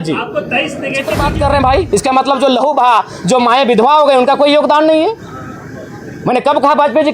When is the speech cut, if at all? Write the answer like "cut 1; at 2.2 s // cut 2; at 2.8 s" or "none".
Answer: cut 1; at 1.2 s